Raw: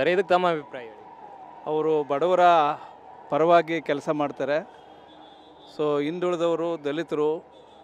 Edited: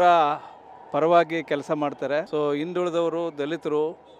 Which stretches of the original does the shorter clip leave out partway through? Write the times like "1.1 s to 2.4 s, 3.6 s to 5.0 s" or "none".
4.7 s to 5.7 s